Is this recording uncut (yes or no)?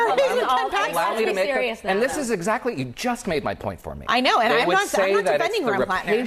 yes